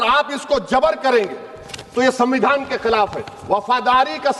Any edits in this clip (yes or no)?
no